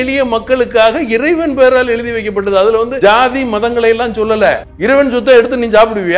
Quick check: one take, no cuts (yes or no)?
no